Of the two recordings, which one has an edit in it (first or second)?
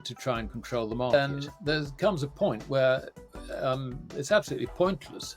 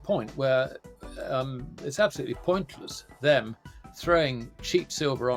first